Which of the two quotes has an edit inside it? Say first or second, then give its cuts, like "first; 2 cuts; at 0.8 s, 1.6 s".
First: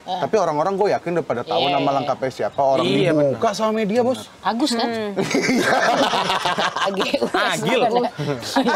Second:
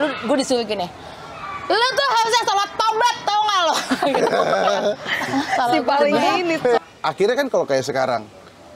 second; 1 cut; at 6.8 s